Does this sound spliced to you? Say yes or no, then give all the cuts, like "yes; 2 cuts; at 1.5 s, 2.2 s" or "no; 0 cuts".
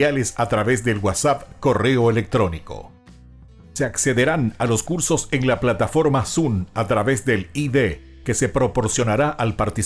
no; 0 cuts